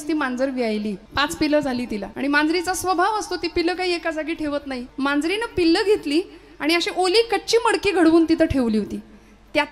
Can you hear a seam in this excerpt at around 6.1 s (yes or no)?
no